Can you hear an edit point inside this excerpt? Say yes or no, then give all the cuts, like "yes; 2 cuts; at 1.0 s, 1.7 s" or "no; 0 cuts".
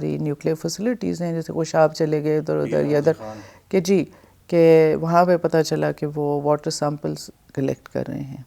no; 0 cuts